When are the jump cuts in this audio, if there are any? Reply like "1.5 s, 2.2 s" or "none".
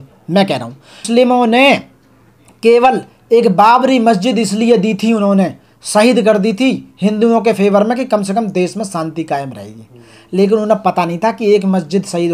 1.0 s